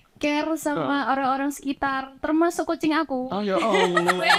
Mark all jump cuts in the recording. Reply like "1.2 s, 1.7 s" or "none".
none